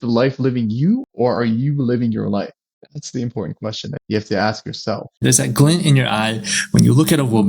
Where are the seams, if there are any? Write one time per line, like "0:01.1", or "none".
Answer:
0:01.1
0:02.7
0:04.0
0:05.2

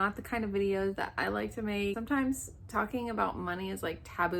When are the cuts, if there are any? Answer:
0:02.0

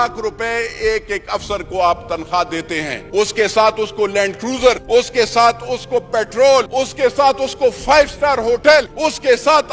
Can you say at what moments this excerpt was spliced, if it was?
0:03.0
0:04.8
0:06.7
0:08.9

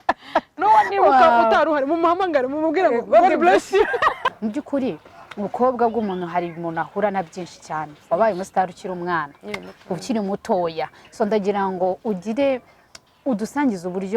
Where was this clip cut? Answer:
0:04.3

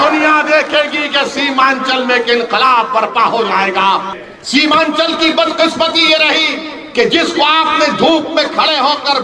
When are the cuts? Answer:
0:04.1

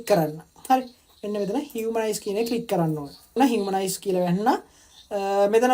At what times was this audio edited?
0:03.4

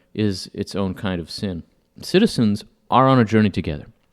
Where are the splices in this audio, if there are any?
0:01.9

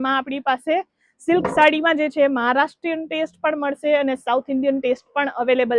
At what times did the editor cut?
none

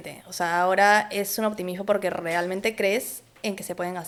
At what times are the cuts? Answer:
none

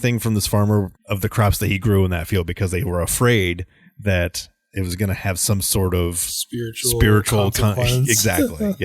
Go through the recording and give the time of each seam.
0:01.0

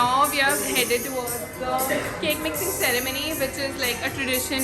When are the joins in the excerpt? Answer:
none

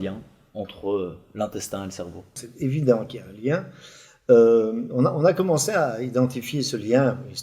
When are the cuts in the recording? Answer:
0:02.4

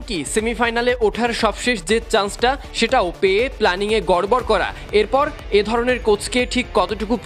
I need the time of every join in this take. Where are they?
none

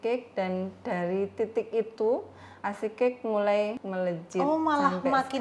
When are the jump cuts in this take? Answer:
0:03.8

